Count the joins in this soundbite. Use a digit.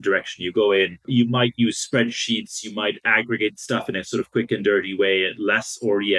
1